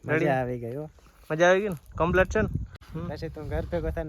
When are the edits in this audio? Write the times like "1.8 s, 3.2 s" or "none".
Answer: 2.8 s